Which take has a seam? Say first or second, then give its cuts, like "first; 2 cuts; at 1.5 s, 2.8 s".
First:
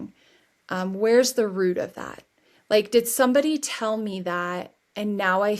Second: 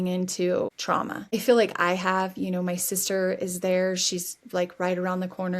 second; 1 cut; at 1.1 s